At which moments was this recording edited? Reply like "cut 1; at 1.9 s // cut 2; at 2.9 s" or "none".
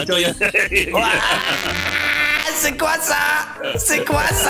cut 1; at 3.5 s